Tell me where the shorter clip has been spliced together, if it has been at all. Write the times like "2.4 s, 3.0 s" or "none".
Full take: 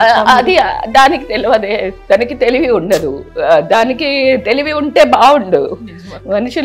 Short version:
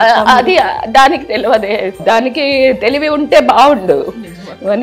2.0 s